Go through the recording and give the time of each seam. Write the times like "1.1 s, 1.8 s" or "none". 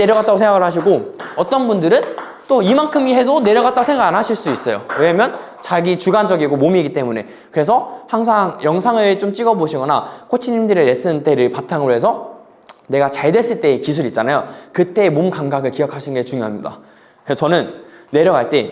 none